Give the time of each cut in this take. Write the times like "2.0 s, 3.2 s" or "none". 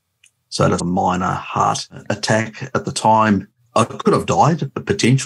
2.1 s, 3.6 s